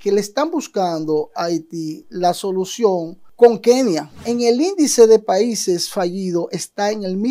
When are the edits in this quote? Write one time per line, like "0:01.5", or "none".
0:04.2